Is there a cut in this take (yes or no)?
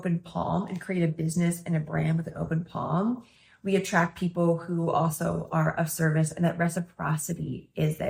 no